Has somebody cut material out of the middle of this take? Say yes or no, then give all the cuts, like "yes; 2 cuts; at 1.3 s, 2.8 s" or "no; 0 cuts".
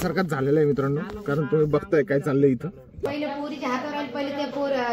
yes; 1 cut; at 3.0 s